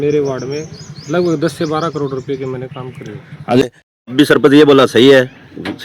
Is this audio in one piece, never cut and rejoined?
no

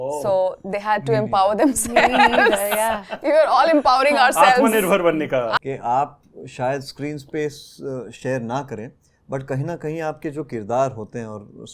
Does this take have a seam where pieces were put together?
yes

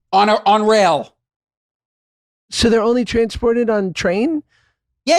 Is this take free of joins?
yes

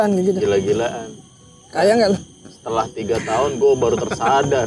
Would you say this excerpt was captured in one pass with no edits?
yes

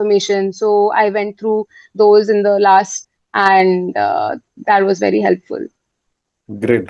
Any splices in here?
no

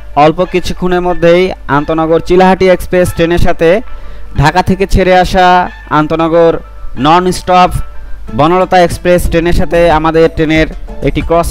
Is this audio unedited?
yes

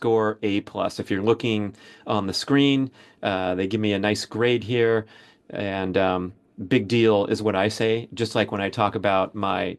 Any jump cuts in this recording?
no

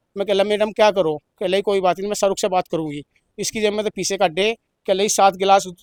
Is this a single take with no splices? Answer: yes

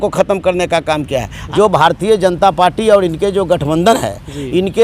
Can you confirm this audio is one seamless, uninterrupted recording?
no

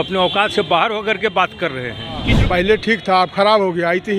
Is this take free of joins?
no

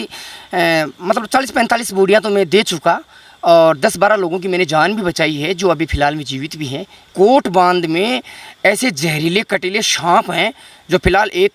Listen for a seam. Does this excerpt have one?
yes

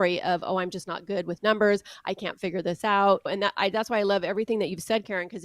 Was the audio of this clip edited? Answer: yes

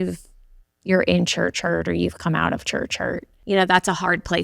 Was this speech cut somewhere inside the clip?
yes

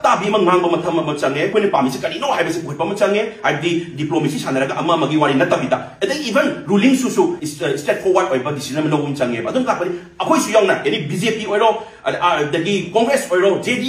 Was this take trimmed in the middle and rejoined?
yes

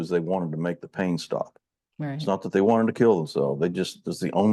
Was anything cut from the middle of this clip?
no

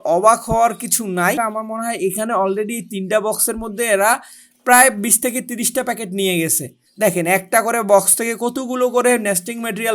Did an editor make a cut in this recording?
yes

